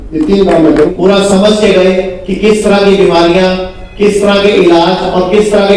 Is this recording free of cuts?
no; 1 cut; at 0.9 s

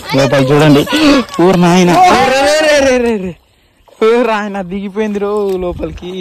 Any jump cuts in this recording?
no; 0 cuts

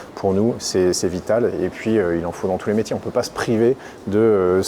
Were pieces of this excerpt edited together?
no; 0 cuts

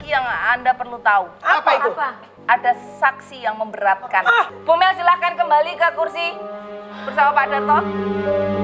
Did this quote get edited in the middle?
no; 0 cuts

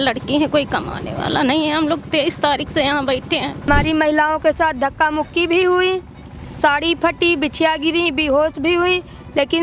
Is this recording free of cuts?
no; 1 cut; at 3.7 s

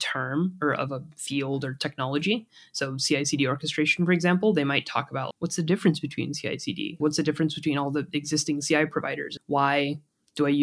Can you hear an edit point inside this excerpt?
yes; 3 cuts; at 5.2 s, 7.0 s, 9.3 s

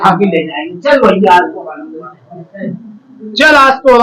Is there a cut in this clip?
no; 0 cuts

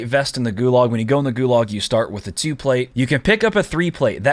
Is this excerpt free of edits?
no; 1 cut; at 2.9 s

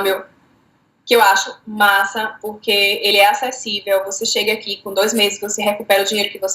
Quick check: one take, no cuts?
yes; 0 cuts

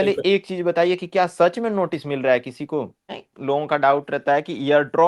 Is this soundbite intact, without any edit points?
no; 1 cut; at 3.0 s

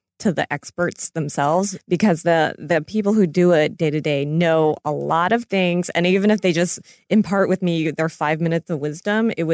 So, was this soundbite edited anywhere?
yes; 1 cut; at 1.8 s

